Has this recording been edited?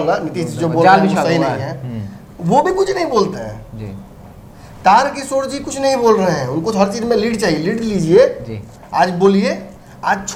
no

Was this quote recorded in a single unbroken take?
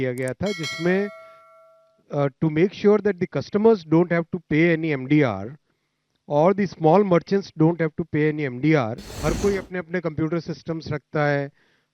no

